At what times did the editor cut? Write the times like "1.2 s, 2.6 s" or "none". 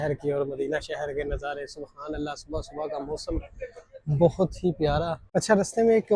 5.2 s